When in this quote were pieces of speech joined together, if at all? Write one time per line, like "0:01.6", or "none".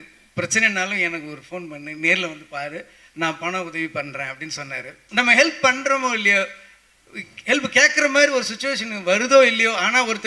0:04.9

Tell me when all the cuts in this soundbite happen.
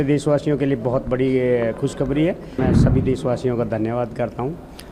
0:02.6

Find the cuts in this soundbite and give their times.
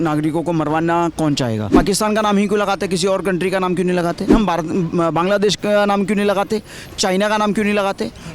0:01.7
0:04.3

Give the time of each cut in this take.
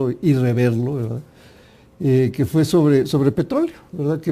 0:02.5

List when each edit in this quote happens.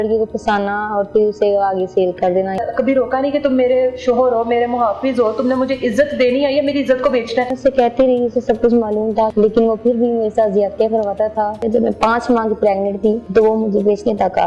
0:02.6
0:07.5
0:09.3
0:11.6
0:13.2

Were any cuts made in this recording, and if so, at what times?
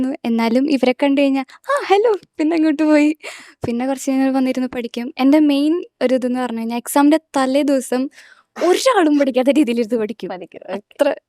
none

